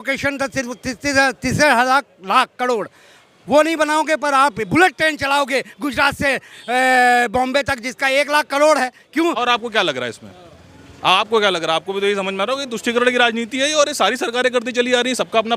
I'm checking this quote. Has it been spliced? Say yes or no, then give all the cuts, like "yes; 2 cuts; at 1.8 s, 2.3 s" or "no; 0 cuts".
yes; 1 cut; at 9.4 s